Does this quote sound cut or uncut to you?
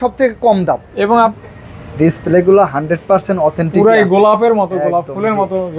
cut